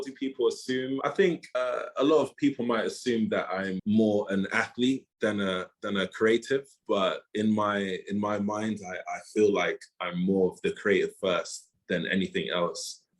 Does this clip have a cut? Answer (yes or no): yes